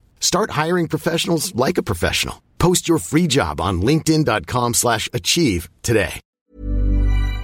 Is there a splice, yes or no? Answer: yes